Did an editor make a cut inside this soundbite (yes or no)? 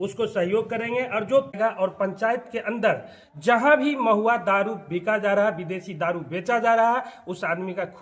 no